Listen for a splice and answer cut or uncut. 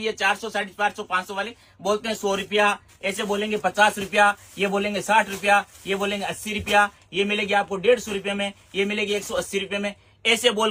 uncut